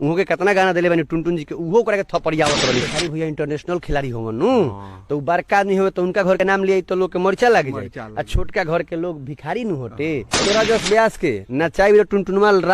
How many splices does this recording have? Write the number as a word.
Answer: two